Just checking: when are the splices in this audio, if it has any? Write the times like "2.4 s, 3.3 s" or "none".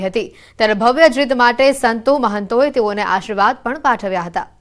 3.4 s